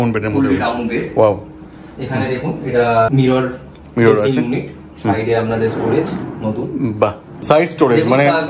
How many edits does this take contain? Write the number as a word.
two